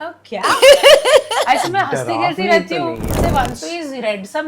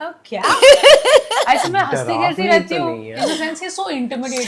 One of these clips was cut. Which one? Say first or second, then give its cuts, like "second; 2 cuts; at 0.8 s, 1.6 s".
first; 1 cut; at 3.2 s